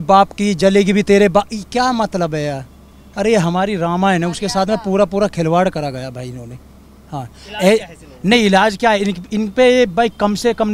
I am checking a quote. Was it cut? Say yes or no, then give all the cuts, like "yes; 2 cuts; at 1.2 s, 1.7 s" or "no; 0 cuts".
no; 0 cuts